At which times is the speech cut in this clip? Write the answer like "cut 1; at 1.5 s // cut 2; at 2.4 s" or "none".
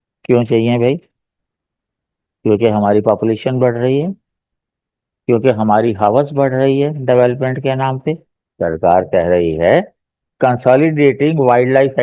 cut 1; at 8.3 s